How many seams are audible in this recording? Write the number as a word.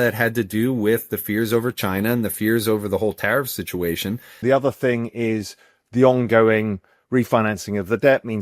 one